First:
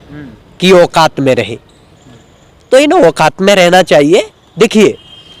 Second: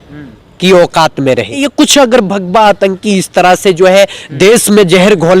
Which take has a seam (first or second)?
second